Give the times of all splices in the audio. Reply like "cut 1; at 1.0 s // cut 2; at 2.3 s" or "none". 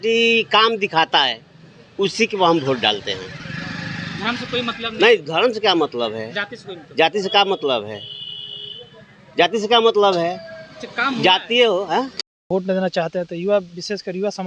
cut 1; at 12.5 s